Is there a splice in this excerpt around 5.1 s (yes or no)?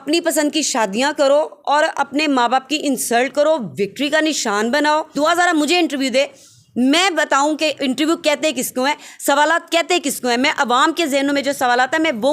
yes